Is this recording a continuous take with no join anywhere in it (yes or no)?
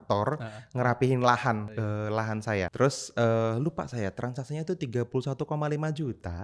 no